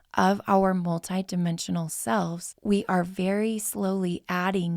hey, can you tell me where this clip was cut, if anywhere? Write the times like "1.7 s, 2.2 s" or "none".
2.5 s